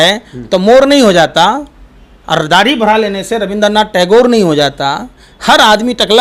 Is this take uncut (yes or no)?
yes